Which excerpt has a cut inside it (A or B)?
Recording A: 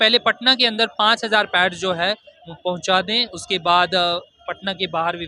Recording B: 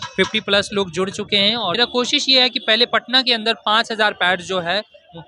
B